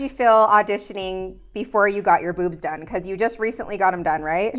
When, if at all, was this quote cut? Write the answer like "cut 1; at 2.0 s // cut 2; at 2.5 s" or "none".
none